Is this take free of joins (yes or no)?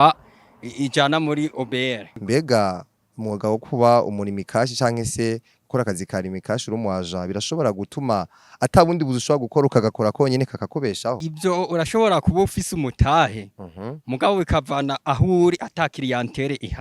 no